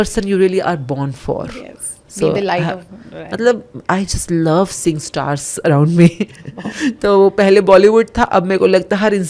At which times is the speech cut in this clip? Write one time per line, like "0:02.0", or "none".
none